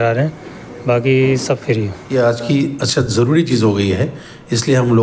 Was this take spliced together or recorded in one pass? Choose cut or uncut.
cut